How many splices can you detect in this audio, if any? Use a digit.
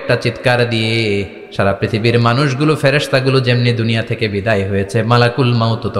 1